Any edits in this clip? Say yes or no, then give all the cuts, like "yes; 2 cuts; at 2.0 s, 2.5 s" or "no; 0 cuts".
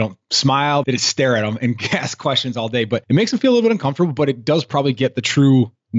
yes; 2 cuts; at 0.8 s, 3.0 s